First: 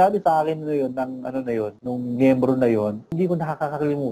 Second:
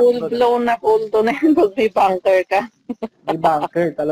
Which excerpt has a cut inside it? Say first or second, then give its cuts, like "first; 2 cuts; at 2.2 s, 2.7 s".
first; 2 cuts; at 1.8 s, 3.1 s